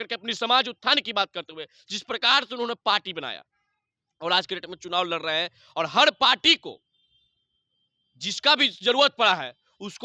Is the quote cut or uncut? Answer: uncut